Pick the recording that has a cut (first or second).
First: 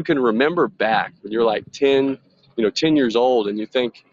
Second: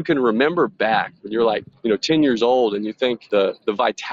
second